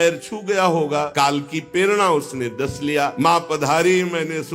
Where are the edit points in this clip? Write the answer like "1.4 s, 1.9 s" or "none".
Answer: 1.1 s, 3.1 s